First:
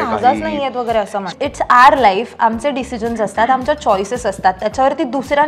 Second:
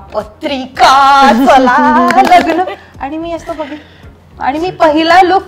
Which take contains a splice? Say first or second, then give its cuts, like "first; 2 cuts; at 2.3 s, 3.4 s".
first; 1 cut; at 1.2 s